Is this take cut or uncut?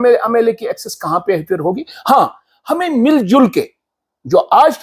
uncut